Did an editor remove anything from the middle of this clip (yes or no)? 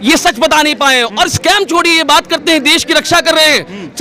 no